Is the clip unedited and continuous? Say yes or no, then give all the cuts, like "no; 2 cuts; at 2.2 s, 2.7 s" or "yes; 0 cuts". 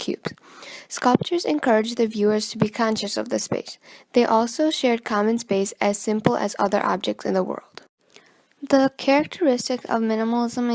yes; 0 cuts